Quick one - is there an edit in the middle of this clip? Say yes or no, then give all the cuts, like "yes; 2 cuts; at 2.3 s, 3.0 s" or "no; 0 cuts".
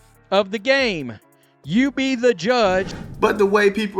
yes; 1 cut; at 3.0 s